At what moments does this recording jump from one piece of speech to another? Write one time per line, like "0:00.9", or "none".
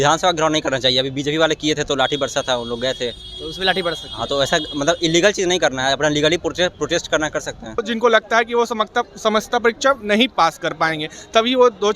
0:07.8